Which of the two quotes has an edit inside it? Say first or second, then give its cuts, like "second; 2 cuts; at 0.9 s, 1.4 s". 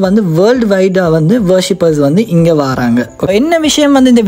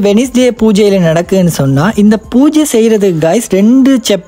first; 1 cut; at 3.3 s